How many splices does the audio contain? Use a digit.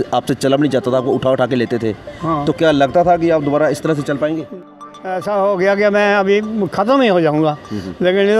1